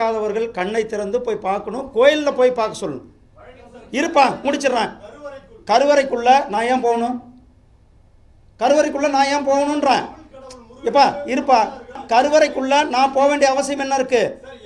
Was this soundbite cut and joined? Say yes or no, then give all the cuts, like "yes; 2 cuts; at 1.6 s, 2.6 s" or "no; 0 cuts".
yes; 1 cut; at 12.0 s